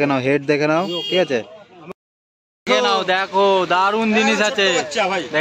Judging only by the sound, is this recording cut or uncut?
cut